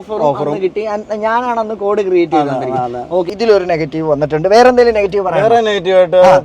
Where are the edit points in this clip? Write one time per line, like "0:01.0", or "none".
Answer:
0:03.3